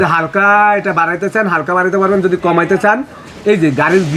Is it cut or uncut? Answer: uncut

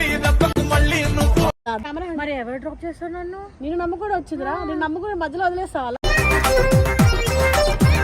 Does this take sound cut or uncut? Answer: cut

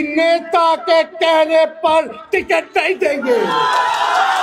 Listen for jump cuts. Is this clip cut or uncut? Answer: uncut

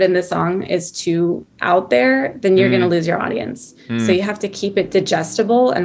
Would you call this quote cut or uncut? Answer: uncut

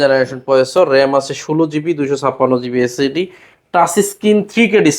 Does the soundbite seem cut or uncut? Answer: uncut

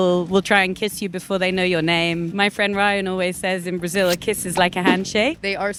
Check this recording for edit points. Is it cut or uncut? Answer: uncut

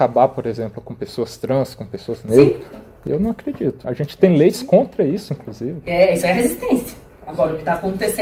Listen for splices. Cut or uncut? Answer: uncut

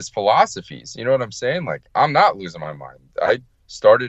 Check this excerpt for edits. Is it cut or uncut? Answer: uncut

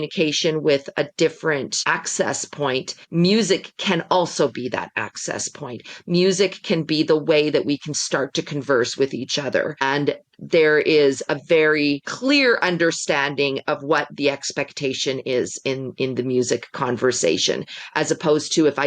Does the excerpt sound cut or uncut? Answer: cut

